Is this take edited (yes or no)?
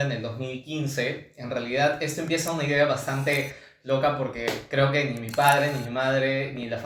no